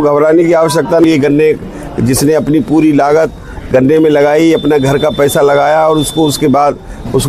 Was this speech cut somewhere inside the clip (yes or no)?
yes